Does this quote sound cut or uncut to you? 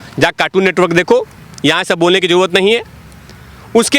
uncut